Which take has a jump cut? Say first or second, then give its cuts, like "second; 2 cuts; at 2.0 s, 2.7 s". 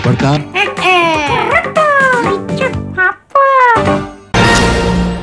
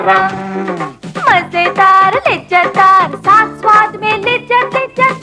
first; 1 cut; at 4.2 s